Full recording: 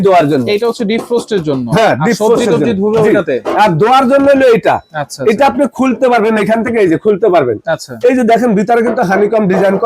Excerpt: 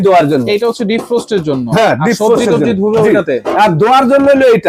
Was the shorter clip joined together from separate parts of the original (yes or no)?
no